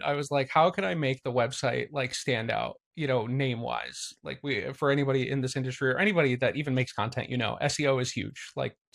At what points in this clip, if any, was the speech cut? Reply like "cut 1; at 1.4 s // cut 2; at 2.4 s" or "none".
none